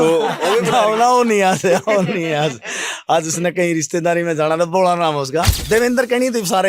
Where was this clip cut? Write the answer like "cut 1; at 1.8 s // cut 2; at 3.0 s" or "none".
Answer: cut 1; at 5.6 s